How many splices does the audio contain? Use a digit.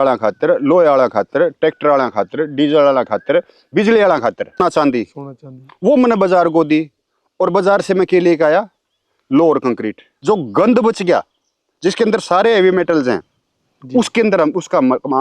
2